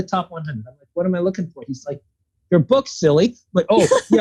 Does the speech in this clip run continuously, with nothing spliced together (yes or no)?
yes